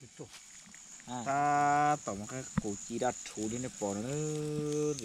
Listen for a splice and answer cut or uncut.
cut